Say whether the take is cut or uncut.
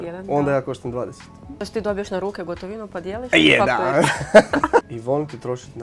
cut